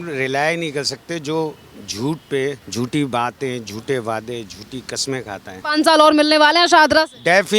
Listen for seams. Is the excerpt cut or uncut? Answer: cut